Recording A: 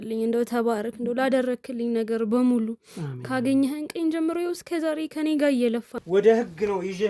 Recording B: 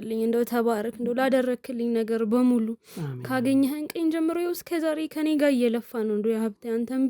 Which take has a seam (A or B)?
A